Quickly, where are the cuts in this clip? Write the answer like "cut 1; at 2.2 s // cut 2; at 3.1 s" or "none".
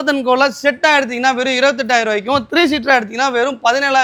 none